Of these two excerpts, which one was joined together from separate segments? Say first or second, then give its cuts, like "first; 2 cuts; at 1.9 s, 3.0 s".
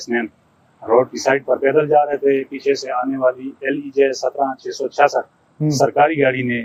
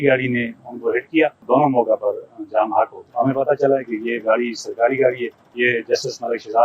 second; 3 cuts; at 1.5 s, 3.0 s, 5.4 s